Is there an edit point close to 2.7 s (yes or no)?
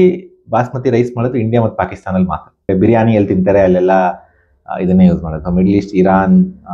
yes